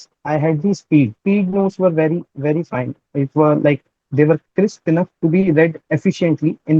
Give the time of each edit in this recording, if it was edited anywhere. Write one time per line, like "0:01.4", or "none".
0:01.2
0:05.9